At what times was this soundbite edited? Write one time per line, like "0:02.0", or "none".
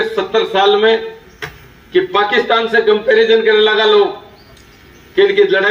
none